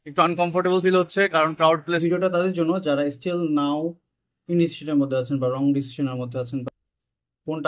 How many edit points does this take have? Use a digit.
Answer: 2